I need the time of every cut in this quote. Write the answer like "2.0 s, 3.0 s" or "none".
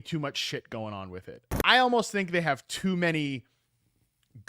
1.4 s